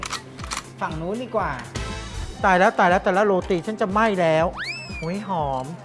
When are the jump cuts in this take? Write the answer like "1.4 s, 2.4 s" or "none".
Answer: 2.2 s, 4.9 s